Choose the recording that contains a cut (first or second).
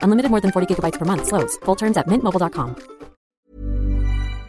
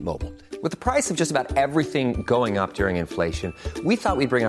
first